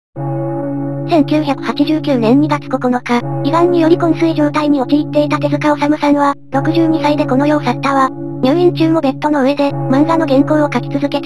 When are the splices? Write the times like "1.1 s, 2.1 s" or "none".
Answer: 1.0 s